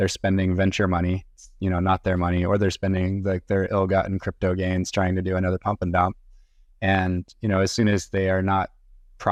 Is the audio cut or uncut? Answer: uncut